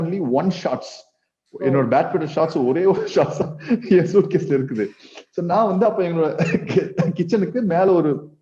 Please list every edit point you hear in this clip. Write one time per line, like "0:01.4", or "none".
none